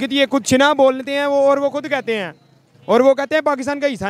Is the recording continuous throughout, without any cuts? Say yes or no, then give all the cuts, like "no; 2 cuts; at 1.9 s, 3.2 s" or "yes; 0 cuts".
yes; 0 cuts